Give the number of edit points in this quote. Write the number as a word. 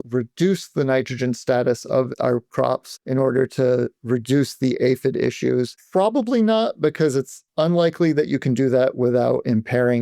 one